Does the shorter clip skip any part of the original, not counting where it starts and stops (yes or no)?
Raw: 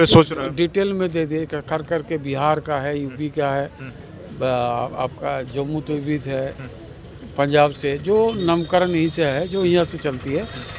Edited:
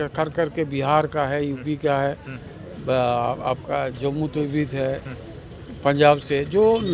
no